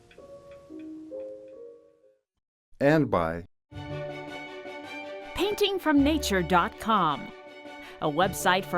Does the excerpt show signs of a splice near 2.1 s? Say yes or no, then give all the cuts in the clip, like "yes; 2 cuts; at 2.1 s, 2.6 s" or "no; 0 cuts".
no; 1 cut; at 3.8 s